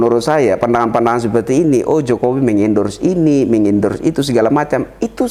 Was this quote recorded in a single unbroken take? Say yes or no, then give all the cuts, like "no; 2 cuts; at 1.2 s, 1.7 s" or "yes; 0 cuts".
yes; 0 cuts